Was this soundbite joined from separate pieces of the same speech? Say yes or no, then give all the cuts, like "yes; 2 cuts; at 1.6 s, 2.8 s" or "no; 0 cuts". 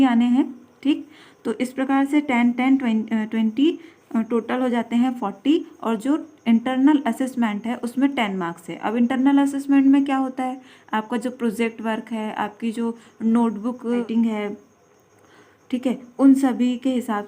yes; 1 cut; at 14.1 s